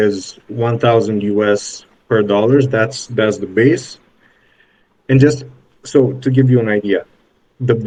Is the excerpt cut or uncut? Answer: uncut